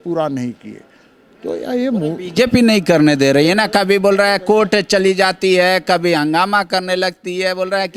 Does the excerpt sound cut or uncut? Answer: uncut